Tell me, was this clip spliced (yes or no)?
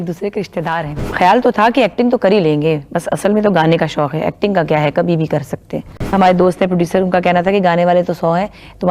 yes